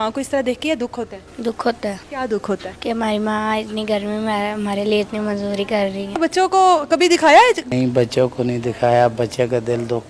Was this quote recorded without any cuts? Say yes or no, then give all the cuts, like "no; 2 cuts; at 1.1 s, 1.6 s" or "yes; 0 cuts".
no; 4 cuts; at 2.0 s, 2.7 s, 6.2 s, 7.6 s